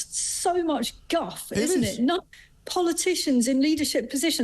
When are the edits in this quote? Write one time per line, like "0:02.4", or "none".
0:02.4